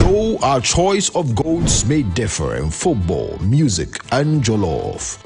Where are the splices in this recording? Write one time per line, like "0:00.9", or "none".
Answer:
none